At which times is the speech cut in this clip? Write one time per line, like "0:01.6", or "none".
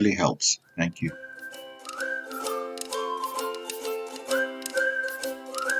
0:01.4